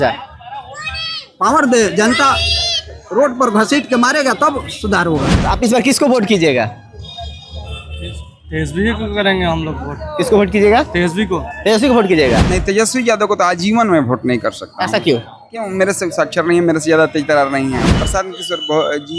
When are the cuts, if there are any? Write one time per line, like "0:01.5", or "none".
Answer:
0:05.3
0:12.4
0:18.0